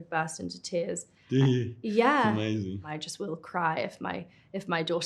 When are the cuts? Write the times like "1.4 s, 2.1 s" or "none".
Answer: 2.9 s